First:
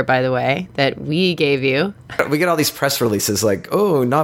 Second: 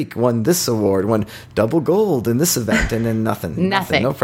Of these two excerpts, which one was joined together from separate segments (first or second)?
first